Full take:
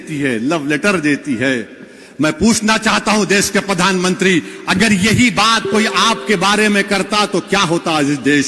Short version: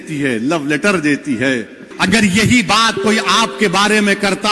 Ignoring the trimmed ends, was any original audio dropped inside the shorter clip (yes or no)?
yes